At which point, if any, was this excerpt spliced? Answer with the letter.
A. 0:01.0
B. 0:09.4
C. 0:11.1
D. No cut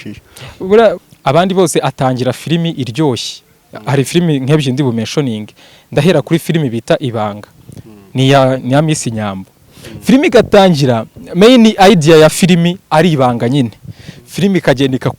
A